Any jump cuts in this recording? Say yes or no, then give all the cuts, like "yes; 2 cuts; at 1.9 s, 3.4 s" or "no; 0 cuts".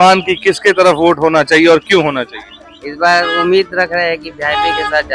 no; 0 cuts